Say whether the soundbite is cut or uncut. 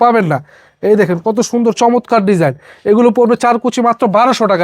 uncut